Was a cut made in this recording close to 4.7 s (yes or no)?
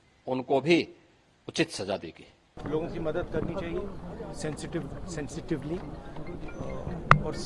no